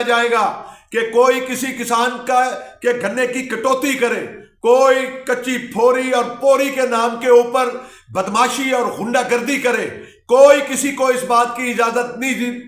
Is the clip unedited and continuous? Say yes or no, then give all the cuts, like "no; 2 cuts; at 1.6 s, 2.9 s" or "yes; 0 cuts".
yes; 0 cuts